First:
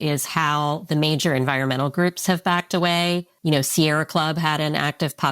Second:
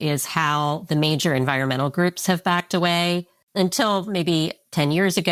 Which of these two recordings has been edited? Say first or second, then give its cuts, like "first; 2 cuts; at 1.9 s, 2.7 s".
first; 1 cut; at 3.3 s